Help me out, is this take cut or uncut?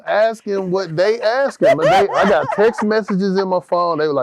uncut